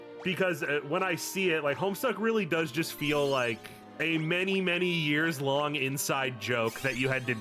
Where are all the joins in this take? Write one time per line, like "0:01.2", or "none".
0:04.0